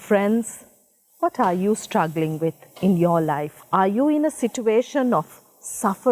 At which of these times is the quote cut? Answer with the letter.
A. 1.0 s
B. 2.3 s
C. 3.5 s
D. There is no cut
C